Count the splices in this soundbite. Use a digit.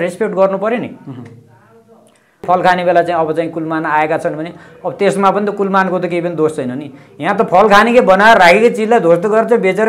1